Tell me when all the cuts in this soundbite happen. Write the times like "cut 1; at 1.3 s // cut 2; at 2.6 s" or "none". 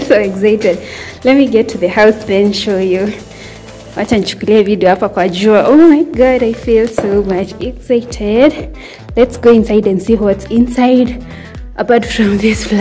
none